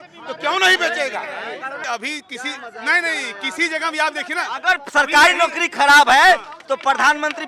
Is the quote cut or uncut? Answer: cut